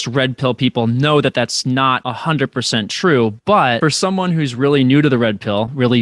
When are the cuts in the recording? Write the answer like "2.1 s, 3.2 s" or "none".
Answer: 2.1 s, 3.8 s